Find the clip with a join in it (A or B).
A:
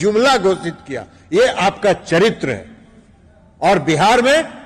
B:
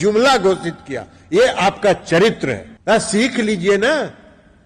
B